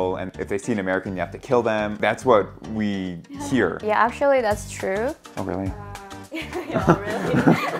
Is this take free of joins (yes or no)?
no